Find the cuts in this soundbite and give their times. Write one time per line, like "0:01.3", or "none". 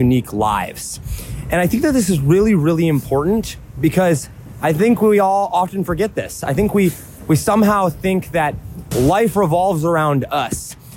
0:08.8